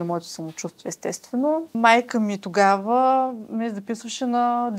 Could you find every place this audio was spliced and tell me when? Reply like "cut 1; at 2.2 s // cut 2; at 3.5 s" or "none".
cut 1; at 1.7 s